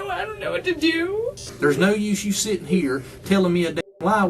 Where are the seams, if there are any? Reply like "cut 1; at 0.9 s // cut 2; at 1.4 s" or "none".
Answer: cut 1; at 1.5 s